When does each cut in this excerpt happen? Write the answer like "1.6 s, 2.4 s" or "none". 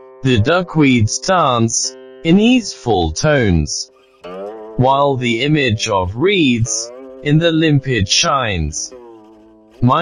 none